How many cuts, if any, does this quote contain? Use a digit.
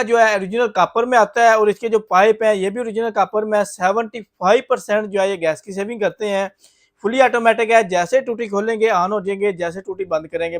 0